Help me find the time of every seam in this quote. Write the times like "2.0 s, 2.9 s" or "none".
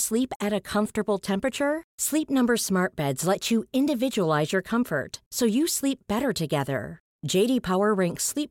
none